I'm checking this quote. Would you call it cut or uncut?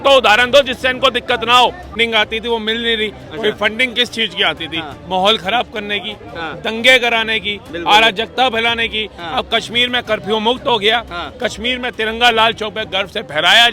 cut